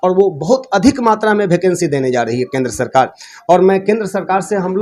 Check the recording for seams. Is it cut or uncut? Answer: uncut